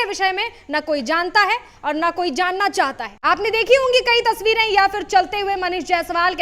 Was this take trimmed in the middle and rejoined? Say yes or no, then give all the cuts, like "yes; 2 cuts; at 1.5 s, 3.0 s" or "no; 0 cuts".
yes; 1 cut; at 3.1 s